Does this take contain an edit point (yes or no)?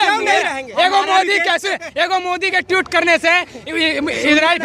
no